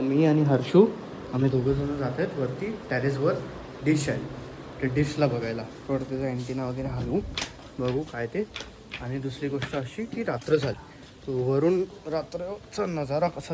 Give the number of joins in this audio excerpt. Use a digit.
0